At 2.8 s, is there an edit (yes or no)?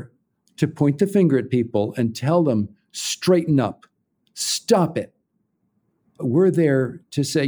no